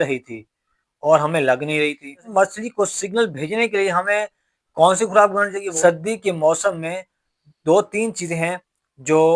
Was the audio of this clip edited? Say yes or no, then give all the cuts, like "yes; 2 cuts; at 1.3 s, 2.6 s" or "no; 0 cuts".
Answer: yes; 2 cuts; at 2.3 s, 5.6 s